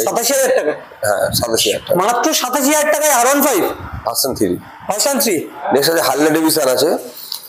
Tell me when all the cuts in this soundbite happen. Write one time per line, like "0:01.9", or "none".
0:05.6